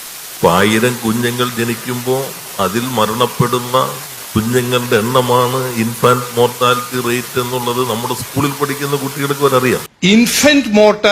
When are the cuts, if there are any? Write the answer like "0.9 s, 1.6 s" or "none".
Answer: 9.9 s